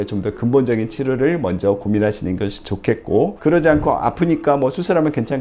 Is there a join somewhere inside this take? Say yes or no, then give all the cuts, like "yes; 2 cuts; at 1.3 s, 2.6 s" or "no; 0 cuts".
yes; 1 cut; at 3.4 s